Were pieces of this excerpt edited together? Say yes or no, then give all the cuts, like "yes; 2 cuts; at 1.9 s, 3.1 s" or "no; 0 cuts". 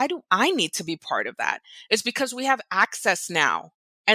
no; 0 cuts